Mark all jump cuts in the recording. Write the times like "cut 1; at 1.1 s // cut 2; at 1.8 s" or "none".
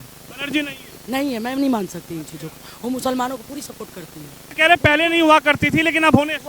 cut 1; at 4.4 s